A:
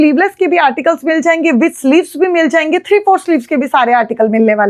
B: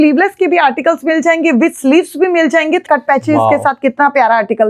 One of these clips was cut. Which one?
B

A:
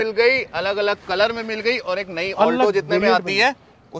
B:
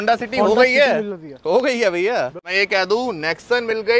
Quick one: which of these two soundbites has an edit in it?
B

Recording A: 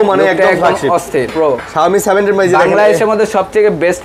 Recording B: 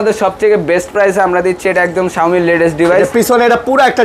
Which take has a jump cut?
A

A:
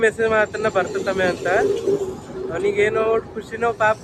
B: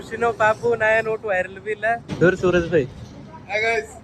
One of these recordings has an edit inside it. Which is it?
B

